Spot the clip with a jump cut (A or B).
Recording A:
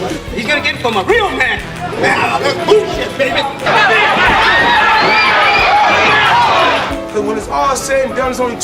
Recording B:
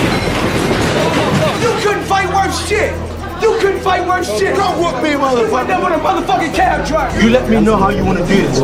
A